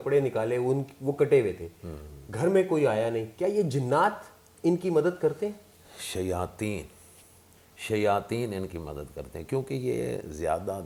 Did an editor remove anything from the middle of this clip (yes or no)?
no